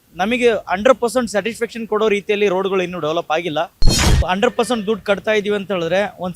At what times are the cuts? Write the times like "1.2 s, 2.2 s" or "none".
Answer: 4.1 s

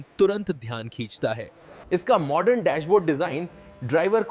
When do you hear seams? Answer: 1.8 s

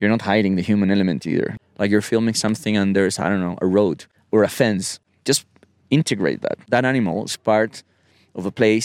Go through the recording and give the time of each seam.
1.5 s, 4.1 s, 4.9 s, 6.6 s

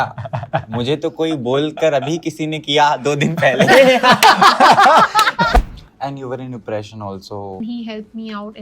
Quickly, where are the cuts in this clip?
5.6 s, 7.6 s

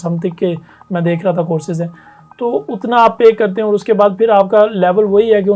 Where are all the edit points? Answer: none

